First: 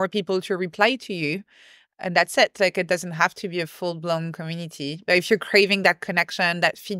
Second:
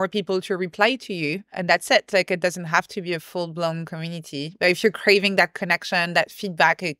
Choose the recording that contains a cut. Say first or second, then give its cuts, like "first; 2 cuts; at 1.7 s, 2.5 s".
second; 1 cut; at 1.5 s